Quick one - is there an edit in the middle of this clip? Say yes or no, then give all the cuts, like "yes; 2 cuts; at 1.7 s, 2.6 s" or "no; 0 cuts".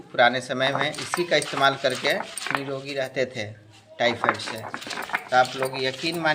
yes; 1 cut; at 5.1 s